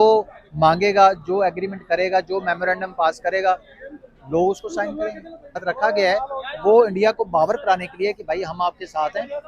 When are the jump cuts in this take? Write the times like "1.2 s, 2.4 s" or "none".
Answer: 5.7 s